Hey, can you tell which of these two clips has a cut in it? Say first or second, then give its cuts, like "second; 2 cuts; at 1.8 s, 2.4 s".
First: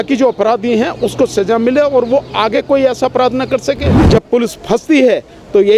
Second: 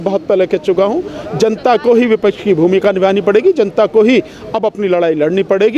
first; 1 cut; at 3.9 s